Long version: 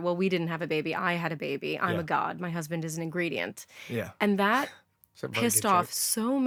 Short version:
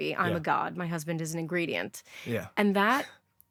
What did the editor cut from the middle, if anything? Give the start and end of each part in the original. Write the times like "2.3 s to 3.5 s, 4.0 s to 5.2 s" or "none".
none